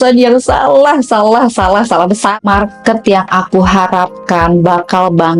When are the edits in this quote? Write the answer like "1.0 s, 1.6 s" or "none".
2.4 s